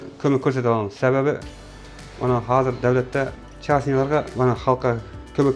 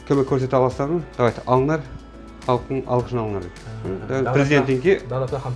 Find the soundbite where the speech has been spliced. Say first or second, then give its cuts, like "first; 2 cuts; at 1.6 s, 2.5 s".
first; 2 cuts; at 3.5 s, 4.3 s